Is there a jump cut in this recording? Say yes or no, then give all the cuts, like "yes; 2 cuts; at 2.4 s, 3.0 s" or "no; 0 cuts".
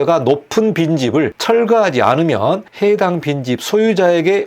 yes; 2 cuts; at 1.4 s, 2.7 s